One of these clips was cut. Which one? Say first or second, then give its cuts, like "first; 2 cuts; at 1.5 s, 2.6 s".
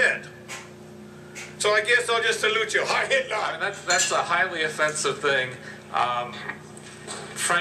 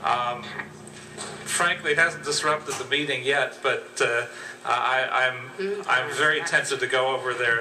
first; 1 cut; at 3.6 s